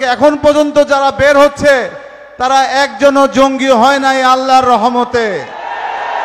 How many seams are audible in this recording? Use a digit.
0